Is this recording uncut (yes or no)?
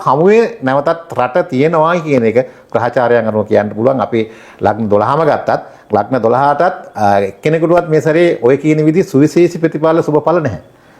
yes